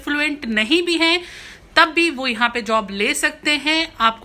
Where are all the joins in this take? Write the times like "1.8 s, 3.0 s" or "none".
none